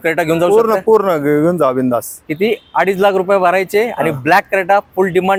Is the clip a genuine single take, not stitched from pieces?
yes; 0 cuts

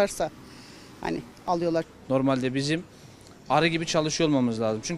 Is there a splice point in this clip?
yes; 1 cut; at 1.5 s

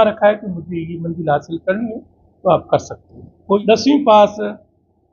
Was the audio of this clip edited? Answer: yes; 1 cut; at 3.6 s

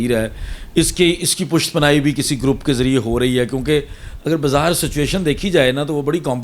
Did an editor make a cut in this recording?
no; 0 cuts

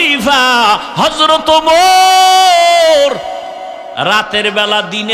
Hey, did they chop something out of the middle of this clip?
yes; 1 cut; at 3.9 s

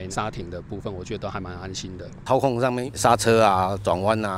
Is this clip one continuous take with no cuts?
no; 1 cut; at 2.1 s

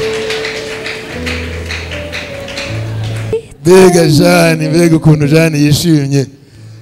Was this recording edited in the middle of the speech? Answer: yes; 1 cut; at 3.4 s

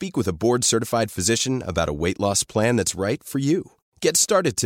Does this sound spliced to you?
no; 0 cuts

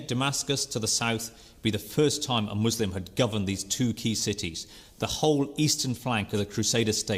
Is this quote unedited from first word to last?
yes; 0 cuts

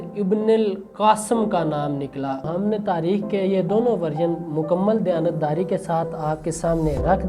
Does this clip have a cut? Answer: yes; 1 cut; at 2.4 s

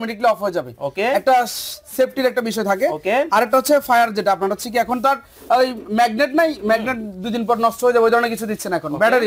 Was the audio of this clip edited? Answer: no; 0 cuts

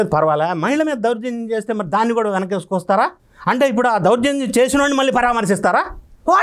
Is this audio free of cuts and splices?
yes; 0 cuts

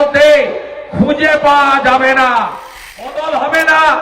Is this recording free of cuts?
no; 1 cut; at 3.1 s

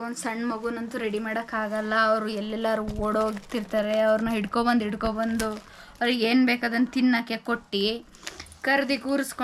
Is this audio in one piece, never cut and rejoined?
yes; 0 cuts

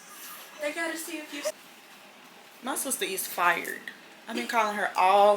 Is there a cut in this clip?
yes; 1 cut; at 1.6 s

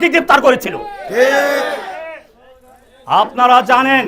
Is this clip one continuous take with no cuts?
yes; 0 cuts

